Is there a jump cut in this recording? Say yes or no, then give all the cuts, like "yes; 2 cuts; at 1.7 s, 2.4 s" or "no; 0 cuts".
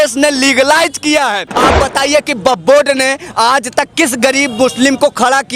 yes; 1 cut; at 1.5 s